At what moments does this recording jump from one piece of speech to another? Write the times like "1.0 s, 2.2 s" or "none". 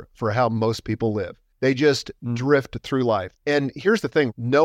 1.4 s, 3.3 s